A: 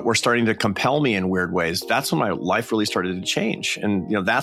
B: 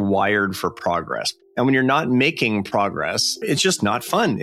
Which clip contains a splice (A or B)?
B